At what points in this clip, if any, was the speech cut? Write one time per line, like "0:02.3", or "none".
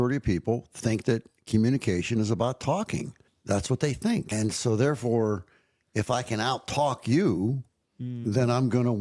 none